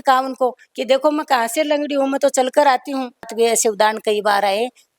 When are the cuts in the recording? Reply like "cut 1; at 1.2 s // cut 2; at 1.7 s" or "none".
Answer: cut 1; at 3.3 s